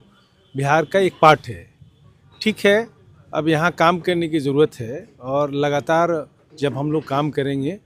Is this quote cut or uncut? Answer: uncut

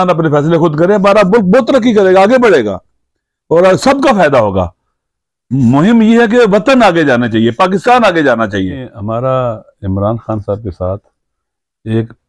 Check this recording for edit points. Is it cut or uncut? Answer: cut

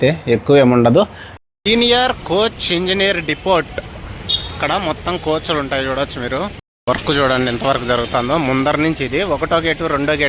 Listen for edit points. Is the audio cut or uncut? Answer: cut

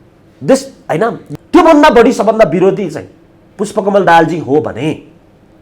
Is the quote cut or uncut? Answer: cut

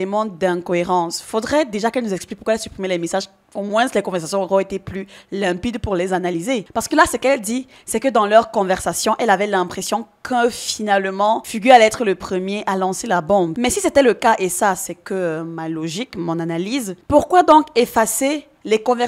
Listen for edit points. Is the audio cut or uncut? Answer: uncut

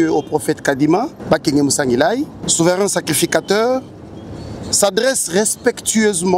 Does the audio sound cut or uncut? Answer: cut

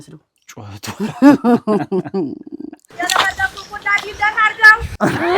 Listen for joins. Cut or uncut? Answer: cut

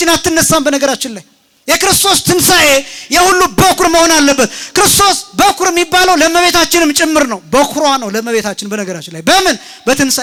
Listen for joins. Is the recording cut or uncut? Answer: uncut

